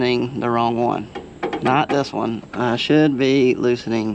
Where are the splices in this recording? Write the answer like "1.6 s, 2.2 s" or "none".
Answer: none